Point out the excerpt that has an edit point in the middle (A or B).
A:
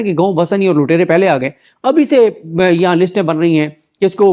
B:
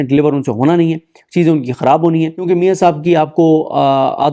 B